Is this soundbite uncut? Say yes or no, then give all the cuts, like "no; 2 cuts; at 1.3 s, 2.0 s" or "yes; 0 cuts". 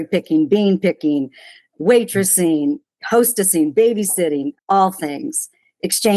no; 1 cut; at 4.5 s